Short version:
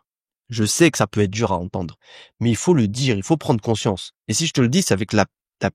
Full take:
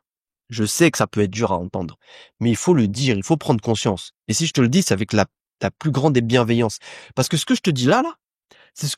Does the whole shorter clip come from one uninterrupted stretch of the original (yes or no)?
yes